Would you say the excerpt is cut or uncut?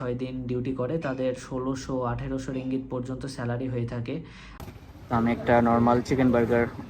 cut